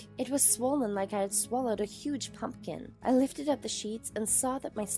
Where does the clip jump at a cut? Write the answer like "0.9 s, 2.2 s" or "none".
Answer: 2.9 s